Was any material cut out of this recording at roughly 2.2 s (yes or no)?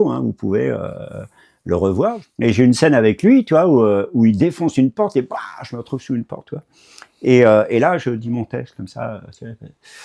yes